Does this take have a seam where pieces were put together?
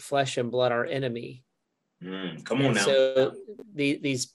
no; 0 cuts

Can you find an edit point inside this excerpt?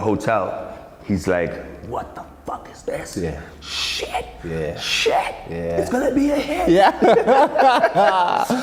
no; 0 cuts

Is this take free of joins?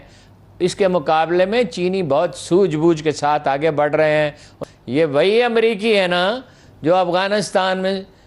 no; 1 cut; at 4.6 s

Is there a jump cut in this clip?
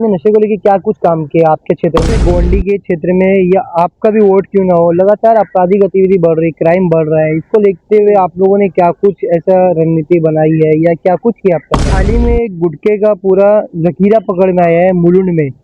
yes; 2 cuts; at 2.1 s, 12.0 s

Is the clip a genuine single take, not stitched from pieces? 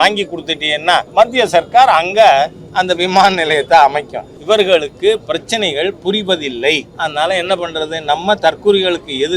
no; 3 cuts; at 1.1 s, 4.3 s, 6.9 s

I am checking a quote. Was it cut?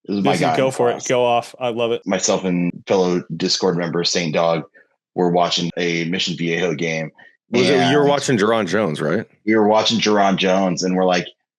yes; 1 cut; at 2.0 s

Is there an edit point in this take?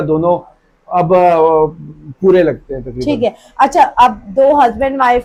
no; 0 cuts

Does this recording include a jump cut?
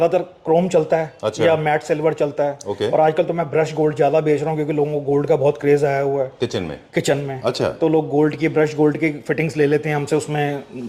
no; 0 cuts

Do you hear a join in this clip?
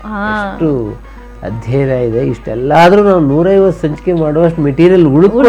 no; 0 cuts

